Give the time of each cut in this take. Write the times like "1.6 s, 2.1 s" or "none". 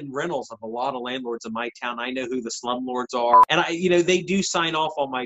3.4 s